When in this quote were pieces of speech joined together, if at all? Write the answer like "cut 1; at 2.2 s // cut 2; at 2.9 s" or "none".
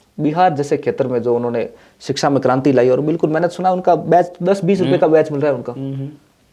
none